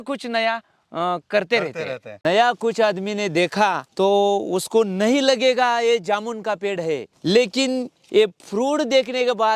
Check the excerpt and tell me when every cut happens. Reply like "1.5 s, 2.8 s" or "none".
2.1 s